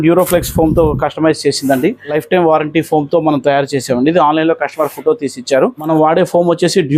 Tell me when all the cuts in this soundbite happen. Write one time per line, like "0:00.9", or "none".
0:02.1
0:05.8